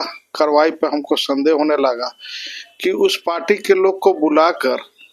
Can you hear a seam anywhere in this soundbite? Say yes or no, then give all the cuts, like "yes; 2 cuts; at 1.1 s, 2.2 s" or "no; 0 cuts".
no; 0 cuts